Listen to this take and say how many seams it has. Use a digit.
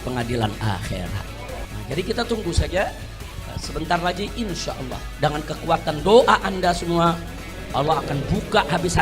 1